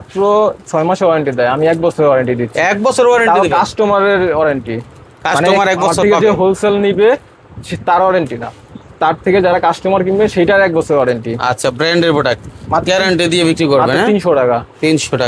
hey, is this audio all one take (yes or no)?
yes